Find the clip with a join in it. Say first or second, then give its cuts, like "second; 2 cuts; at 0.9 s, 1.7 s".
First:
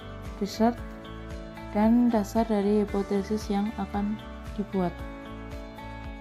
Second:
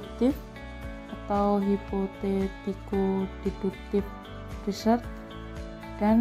first; 1 cut; at 5.1 s